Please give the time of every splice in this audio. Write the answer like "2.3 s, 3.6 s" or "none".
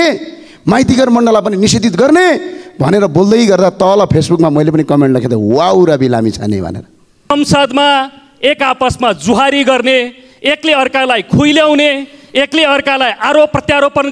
7.3 s